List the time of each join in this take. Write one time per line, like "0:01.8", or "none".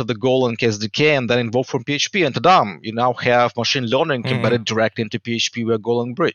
none